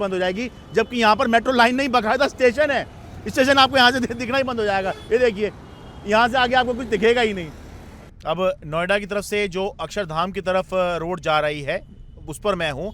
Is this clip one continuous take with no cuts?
yes; 0 cuts

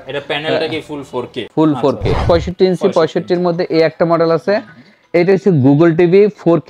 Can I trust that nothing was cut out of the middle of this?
no; 1 cut; at 2.2 s

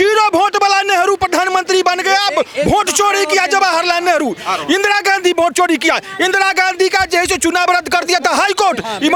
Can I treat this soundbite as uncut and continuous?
yes; 0 cuts

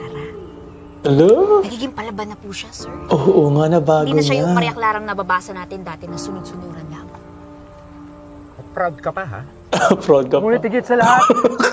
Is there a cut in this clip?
no; 0 cuts

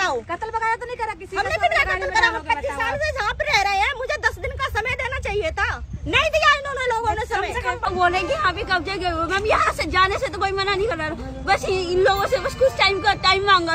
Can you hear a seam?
yes; 1 cut; at 7.9 s

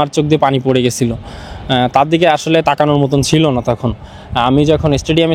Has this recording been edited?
no; 0 cuts

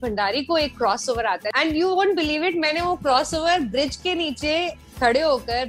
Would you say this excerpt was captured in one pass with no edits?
no; 1 cut; at 1.5 s

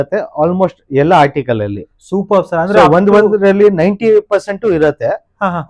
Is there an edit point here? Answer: no; 0 cuts

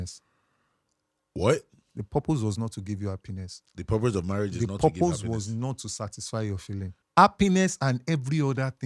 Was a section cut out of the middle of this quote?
yes; 1 cut; at 7.0 s

